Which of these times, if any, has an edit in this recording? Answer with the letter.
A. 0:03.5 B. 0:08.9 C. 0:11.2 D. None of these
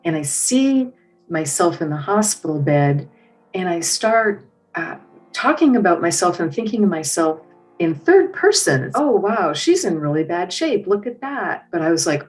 B